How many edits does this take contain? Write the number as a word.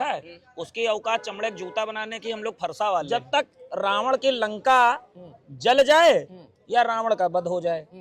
one